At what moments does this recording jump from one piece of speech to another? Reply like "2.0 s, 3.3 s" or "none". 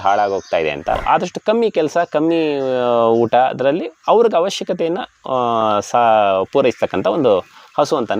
1.0 s